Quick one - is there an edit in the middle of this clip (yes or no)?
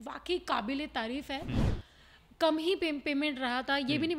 yes